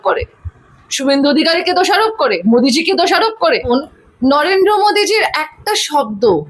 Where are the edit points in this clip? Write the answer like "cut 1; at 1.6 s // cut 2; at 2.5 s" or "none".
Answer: cut 1; at 3.7 s